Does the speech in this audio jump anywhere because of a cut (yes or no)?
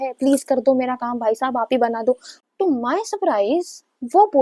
yes